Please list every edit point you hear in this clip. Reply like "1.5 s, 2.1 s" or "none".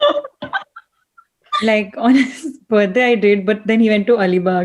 1.5 s